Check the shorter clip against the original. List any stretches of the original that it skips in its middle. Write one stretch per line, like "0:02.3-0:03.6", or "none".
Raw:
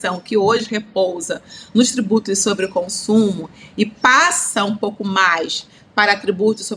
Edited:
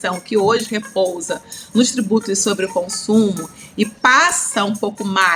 none